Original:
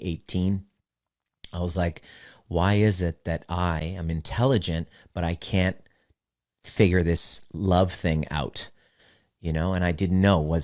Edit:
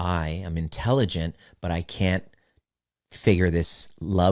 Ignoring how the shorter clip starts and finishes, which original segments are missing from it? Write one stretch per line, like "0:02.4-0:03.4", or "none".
none